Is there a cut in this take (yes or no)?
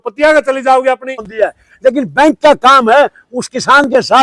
yes